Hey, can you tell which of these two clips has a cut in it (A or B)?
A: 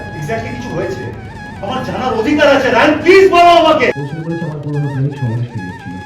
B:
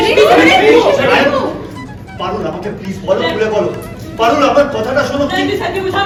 A